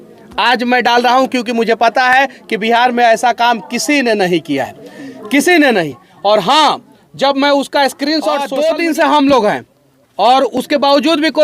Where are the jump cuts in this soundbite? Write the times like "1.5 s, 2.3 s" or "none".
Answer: 8.5 s